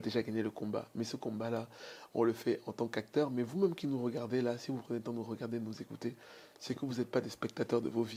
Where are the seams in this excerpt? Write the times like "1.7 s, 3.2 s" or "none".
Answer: none